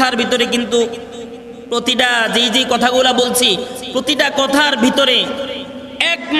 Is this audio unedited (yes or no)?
yes